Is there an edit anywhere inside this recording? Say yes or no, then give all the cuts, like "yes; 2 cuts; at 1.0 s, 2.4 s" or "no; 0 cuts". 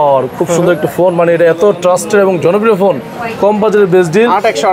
no; 0 cuts